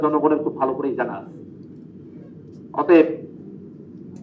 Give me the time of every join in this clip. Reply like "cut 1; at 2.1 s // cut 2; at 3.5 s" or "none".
none

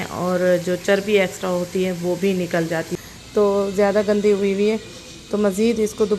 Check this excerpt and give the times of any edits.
cut 1; at 2.9 s

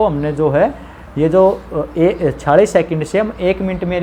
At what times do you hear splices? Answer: none

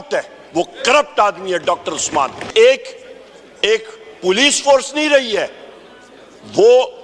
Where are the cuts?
cut 1; at 2.4 s

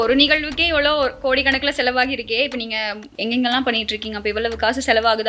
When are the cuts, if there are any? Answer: cut 1; at 3.0 s

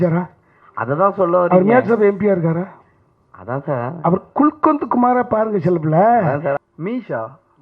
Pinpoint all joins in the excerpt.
cut 1; at 6.6 s

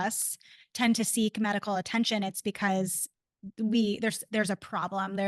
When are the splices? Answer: none

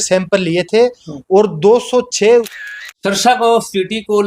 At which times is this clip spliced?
cut 1; at 2.5 s

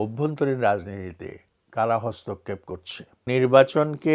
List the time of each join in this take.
cut 1; at 3.2 s

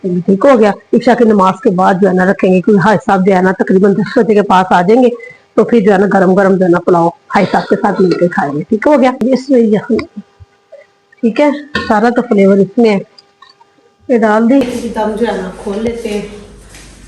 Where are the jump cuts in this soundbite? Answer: cut 1; at 9.2 s // cut 2; at 14.6 s

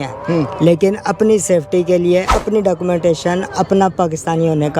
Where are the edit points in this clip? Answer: cut 1; at 2.3 s

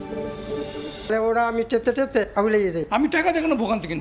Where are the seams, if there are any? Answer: cut 1; at 1.1 s

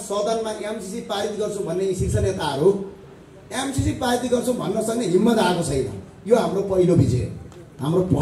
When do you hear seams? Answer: none

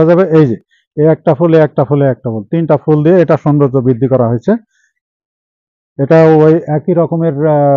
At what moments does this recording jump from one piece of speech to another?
none

